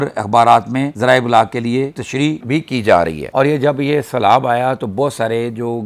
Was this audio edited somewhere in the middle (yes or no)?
yes